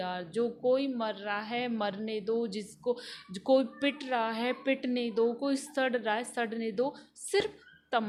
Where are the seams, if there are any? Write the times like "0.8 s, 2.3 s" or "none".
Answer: none

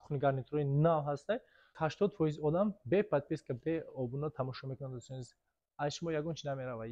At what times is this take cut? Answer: 1.7 s

